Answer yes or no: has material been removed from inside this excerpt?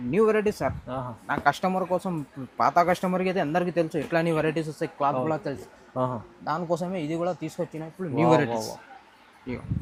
no